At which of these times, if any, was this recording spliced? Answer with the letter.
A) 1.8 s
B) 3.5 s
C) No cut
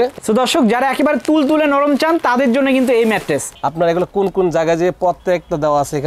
B